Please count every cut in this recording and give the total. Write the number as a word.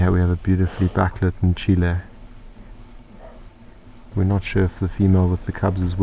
one